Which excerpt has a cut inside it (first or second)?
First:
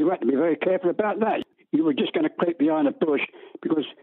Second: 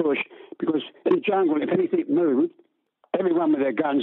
first